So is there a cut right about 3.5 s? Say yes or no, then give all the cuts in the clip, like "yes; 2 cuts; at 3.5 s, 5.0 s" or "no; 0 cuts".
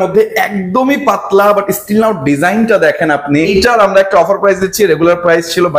yes; 1 cut; at 3.5 s